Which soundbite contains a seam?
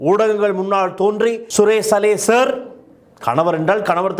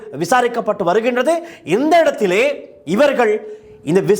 first; 1 cut; at 1.4 s

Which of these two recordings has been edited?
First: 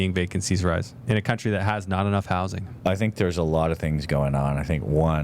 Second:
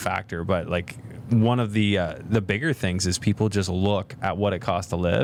first; 2 cuts; at 0.9 s, 2.7 s

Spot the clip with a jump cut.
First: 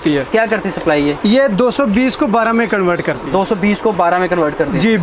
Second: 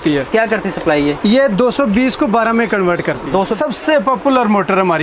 second; 1 cut; at 3.5 s

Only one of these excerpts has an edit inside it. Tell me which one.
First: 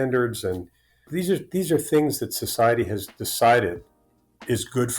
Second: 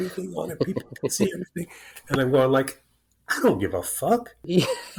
first; 1 cut; at 1.1 s

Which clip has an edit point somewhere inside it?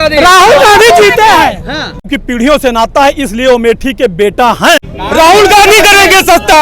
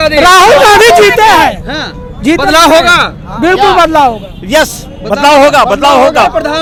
first; 2 cuts; at 2.1 s, 4.9 s

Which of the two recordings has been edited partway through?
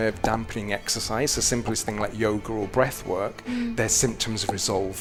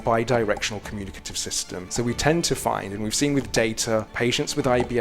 second; 2 cuts; at 1.9 s, 4.1 s

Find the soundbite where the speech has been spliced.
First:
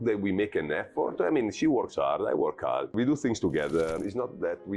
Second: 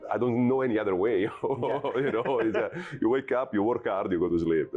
first; 2 cuts; at 2.9 s, 4.0 s

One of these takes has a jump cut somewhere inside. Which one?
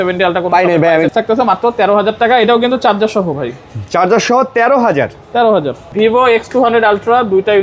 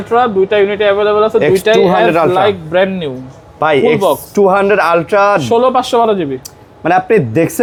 first; 2 cuts; at 1.1 s, 5.8 s

